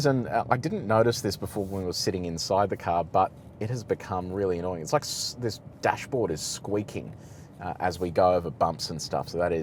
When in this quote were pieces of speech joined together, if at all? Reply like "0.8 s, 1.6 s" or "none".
none